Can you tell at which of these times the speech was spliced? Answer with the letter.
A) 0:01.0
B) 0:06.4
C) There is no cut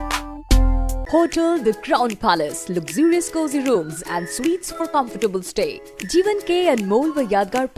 A